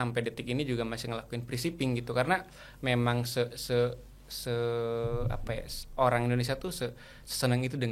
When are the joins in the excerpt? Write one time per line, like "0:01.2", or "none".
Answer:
none